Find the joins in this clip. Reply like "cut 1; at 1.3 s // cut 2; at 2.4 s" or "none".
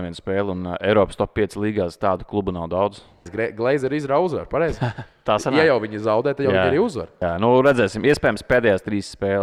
cut 1; at 3.3 s // cut 2; at 7.1 s